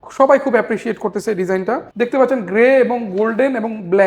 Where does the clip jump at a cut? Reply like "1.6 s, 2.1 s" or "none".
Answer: 1.9 s